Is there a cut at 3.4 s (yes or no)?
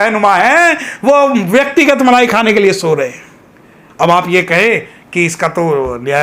no